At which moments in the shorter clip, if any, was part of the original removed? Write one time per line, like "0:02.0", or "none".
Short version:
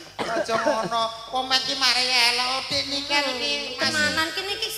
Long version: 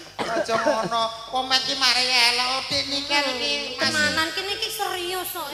none